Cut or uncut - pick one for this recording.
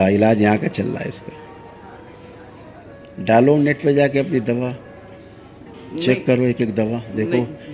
uncut